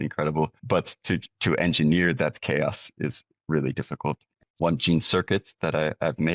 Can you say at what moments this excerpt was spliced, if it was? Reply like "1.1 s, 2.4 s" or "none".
4.4 s